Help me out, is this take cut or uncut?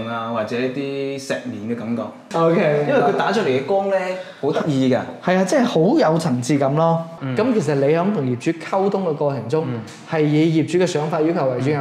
cut